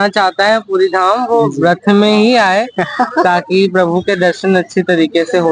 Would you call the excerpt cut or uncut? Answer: uncut